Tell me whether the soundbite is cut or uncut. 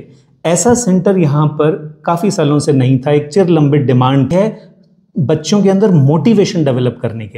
cut